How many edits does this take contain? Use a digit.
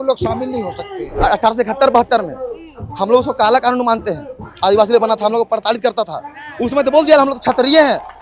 1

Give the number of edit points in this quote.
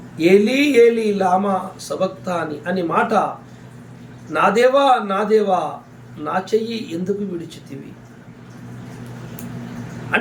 0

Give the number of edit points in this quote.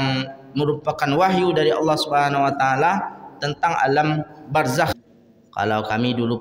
1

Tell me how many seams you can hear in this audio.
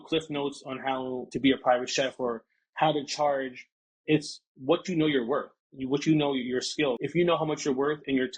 2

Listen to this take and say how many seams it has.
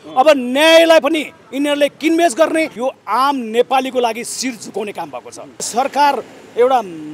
2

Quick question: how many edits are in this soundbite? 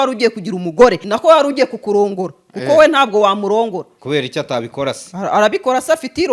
1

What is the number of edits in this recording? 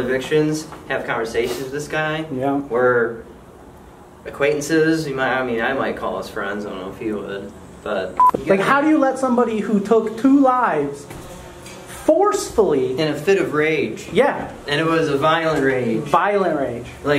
1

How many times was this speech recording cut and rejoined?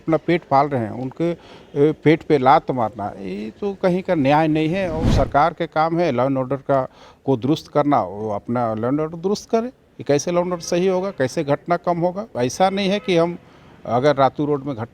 2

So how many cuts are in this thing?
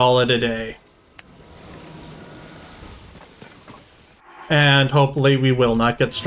0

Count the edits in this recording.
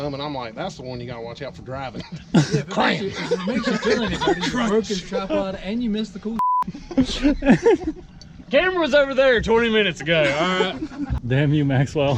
1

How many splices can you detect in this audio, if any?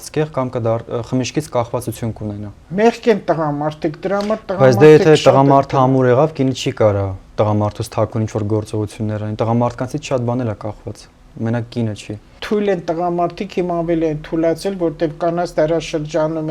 2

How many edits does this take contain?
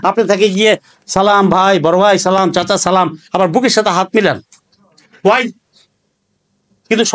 0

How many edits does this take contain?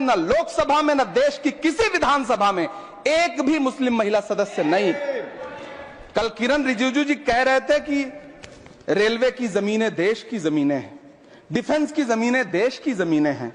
0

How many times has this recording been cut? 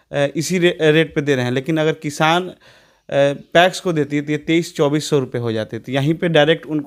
0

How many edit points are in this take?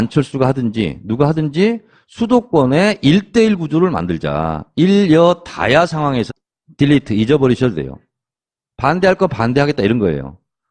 0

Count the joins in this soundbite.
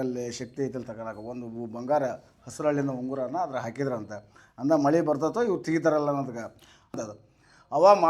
1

